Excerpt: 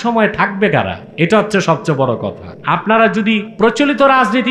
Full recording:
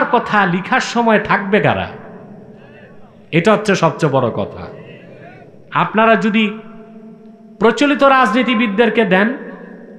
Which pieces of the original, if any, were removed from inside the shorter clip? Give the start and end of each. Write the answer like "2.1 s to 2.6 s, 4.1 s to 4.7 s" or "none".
1.9 s to 3.2 s, 4.6 s to 5.6 s, 6.6 s to 7.5 s